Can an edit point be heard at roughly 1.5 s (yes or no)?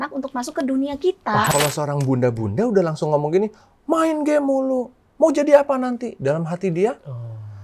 yes